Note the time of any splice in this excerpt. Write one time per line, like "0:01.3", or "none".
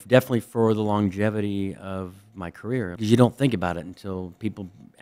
0:02.9